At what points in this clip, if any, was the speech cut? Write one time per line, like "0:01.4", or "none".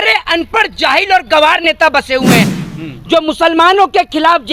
0:02.5